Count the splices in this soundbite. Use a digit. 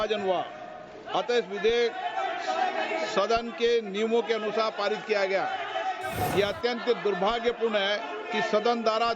1